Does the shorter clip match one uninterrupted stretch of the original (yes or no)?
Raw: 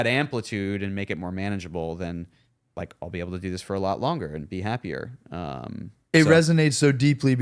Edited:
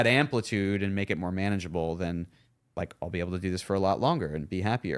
yes